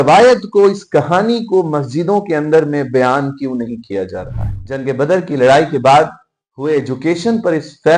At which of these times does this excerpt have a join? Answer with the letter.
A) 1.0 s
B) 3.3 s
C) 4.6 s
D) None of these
C